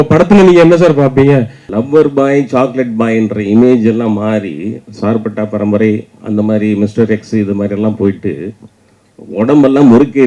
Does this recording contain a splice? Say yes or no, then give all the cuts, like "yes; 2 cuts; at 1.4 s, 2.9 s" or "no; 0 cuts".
yes; 1 cut; at 1.6 s